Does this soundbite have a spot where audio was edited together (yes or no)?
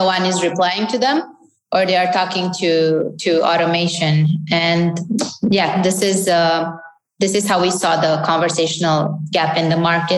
no